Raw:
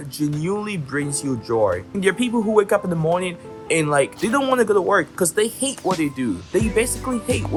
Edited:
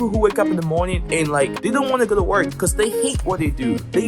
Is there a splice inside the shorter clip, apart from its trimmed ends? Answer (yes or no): yes